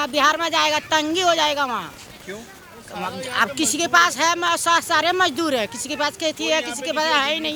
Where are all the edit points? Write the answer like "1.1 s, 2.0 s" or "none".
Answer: none